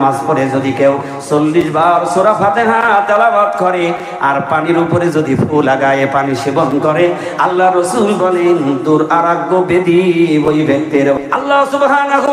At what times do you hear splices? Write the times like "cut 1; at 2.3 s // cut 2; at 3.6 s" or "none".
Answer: cut 1; at 11.2 s